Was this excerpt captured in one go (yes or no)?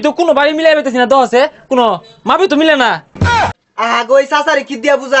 no